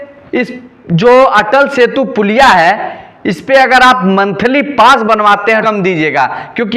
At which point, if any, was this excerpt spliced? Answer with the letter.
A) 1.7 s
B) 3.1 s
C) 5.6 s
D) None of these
C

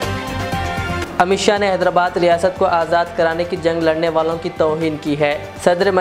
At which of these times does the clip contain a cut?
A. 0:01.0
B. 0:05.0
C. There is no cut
A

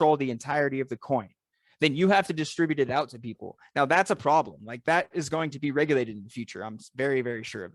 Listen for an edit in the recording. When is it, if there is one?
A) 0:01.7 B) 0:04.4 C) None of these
C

